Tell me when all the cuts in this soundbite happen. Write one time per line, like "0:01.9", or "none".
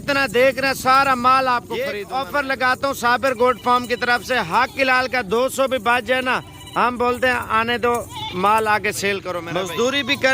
0:02.0
0:09.4